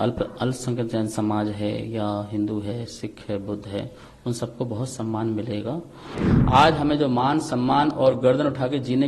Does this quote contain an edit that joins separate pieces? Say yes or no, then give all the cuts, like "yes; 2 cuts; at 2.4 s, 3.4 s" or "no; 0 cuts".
yes; 1 cut; at 6.2 s